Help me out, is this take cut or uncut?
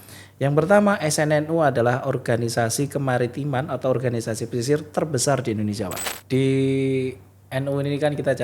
cut